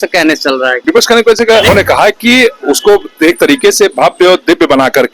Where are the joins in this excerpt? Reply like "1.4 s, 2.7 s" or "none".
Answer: 0.8 s, 1.7 s